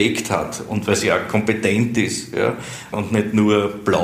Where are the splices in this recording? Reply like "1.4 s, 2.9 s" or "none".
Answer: 2.9 s